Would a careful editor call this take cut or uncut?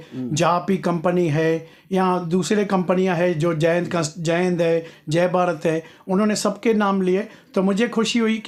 uncut